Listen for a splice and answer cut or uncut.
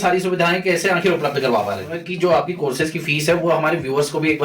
cut